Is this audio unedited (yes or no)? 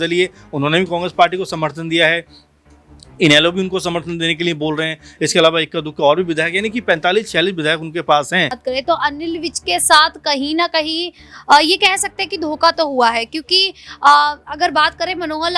no